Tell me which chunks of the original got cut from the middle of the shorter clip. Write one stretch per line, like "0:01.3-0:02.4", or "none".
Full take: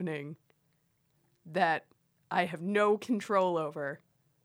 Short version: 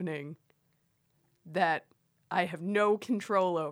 none